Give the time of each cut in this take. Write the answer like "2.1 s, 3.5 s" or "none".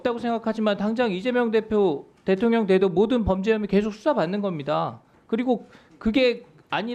none